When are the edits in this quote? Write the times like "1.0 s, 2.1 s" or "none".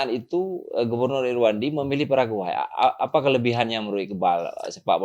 none

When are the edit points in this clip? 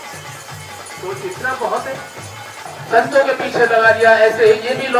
2.7 s

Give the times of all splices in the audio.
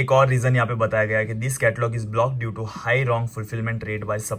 none

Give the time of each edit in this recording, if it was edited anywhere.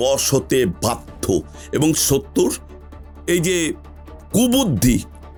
none

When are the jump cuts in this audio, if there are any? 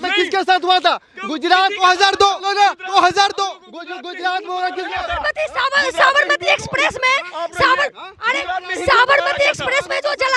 none

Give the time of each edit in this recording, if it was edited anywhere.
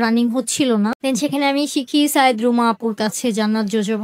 1.0 s

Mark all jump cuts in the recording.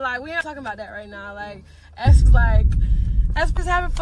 none

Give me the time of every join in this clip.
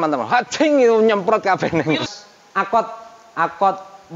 2.0 s

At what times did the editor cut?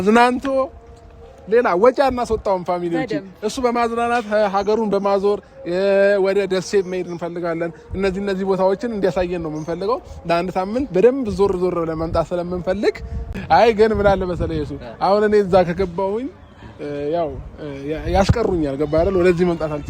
13.3 s

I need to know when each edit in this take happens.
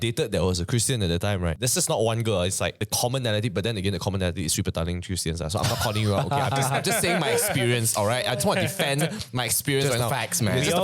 1.6 s, 2.8 s

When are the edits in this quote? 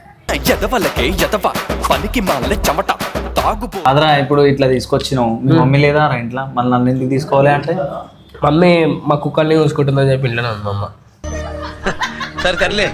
3.8 s

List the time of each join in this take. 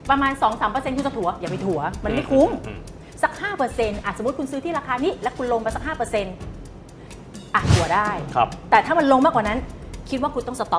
none

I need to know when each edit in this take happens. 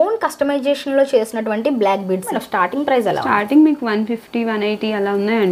2.3 s

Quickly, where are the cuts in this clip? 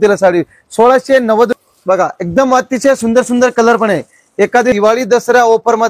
1.5 s, 4.8 s

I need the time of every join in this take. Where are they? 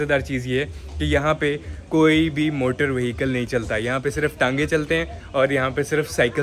none

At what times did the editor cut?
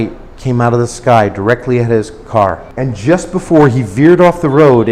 2.7 s

